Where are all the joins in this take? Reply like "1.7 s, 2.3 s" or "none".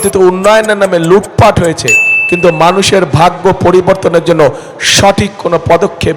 none